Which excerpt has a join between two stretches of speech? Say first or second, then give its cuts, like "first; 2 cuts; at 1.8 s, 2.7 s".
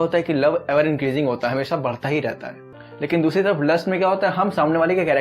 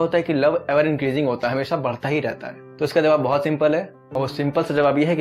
first; 1 cut; at 2.7 s